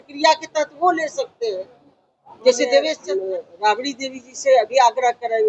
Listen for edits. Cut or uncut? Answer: cut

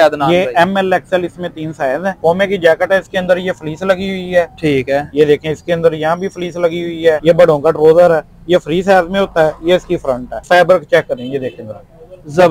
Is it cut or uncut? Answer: cut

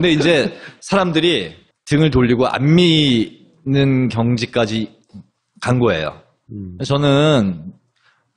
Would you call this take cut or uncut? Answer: uncut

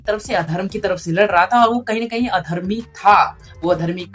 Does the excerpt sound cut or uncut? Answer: uncut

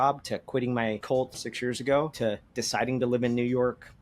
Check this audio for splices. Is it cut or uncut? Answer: cut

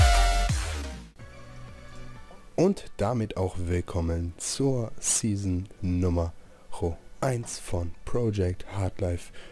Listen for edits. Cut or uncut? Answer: uncut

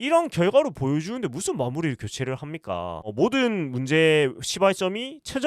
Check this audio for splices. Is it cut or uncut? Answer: cut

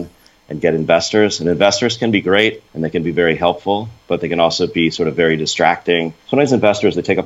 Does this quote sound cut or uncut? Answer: cut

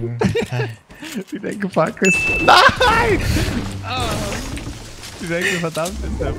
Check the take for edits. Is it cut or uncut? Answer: uncut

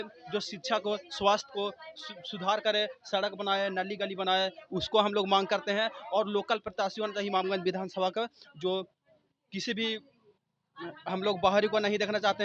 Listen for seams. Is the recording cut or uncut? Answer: uncut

